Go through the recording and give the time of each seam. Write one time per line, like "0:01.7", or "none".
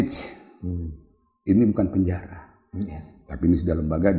none